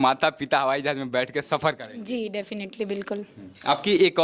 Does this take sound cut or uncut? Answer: uncut